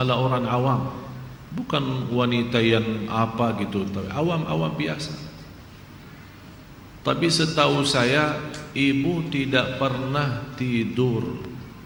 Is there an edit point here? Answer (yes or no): no